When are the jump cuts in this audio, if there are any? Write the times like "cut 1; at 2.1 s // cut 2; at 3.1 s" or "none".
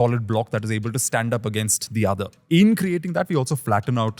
cut 1; at 2.4 s